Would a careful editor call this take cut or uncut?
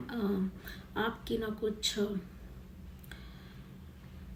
uncut